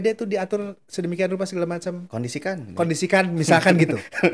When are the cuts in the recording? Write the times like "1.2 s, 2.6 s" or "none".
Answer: none